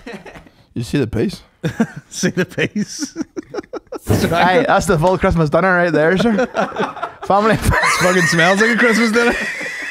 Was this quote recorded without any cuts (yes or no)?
no